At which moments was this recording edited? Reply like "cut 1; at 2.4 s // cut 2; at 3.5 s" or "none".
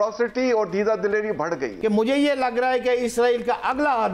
cut 1; at 1.7 s